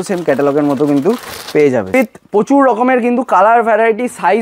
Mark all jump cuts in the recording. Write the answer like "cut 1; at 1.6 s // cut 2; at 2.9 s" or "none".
cut 1; at 1.9 s